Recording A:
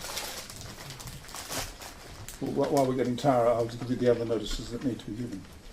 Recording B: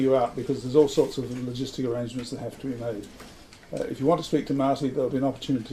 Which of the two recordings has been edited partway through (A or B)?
A